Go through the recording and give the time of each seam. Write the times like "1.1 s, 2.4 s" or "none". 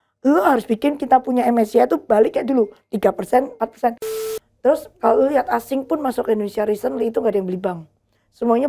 4.2 s